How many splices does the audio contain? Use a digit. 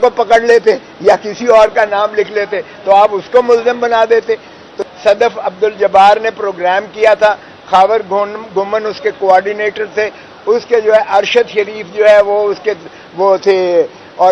1